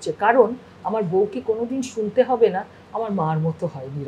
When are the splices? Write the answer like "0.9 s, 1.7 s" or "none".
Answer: none